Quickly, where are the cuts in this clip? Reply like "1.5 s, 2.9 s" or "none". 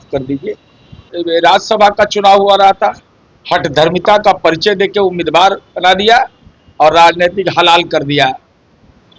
1.0 s

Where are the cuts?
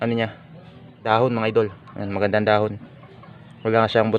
1.0 s

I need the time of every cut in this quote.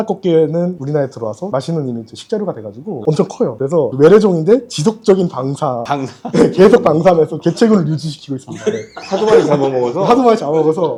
none

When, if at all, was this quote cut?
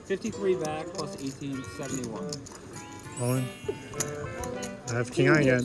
2.5 s

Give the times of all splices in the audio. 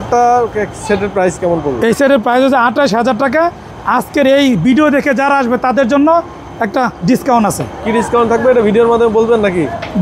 none

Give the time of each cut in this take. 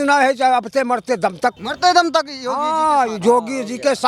1.7 s

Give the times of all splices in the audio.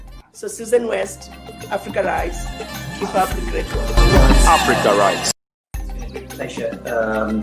5.4 s

